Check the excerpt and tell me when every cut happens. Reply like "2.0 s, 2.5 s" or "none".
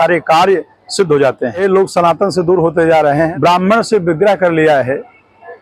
1.6 s, 3.3 s